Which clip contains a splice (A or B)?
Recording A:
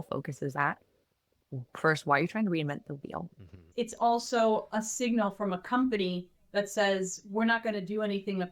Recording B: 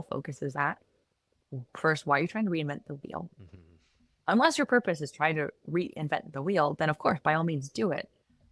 A